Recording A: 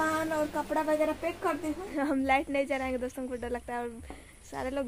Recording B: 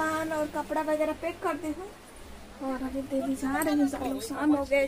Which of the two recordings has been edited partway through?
A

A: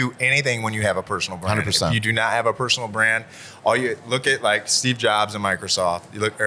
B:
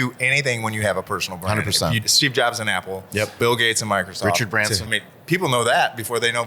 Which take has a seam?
B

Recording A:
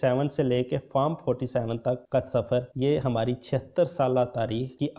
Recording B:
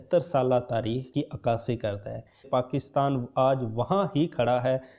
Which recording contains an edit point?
B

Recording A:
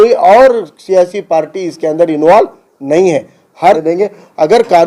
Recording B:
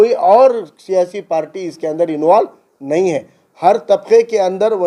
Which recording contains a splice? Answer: A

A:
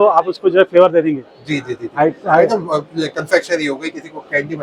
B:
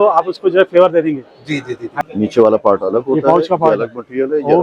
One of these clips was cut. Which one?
B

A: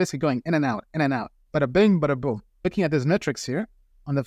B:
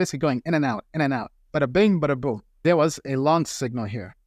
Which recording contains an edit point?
B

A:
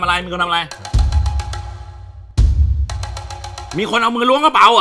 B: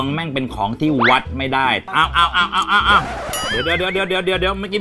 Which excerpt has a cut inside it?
B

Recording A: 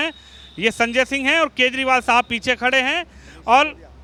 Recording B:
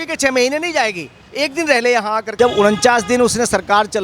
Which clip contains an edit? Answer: B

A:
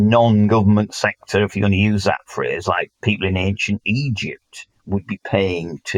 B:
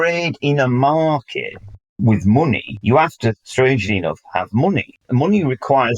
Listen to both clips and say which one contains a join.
B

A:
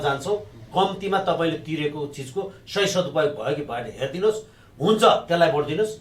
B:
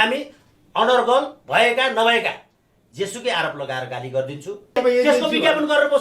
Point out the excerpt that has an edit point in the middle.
B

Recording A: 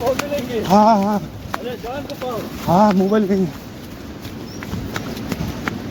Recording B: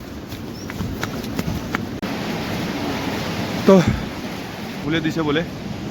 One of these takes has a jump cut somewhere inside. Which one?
B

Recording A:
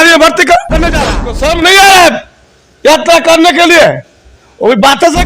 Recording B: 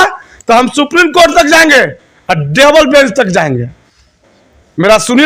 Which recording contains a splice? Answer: A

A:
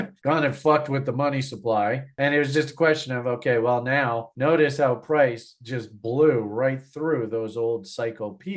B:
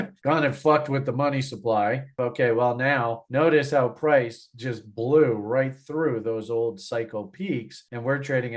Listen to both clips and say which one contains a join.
B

